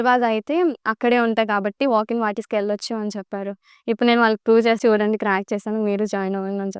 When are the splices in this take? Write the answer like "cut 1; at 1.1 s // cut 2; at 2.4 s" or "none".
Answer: cut 1; at 4.8 s